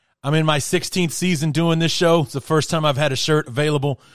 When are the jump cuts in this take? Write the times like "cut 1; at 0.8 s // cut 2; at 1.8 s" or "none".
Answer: none

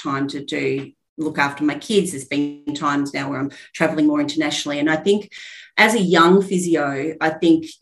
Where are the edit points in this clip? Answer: none

